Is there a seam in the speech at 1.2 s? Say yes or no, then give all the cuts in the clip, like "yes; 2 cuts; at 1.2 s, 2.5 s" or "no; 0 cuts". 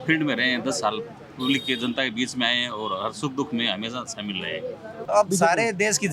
no; 1 cut; at 5.0 s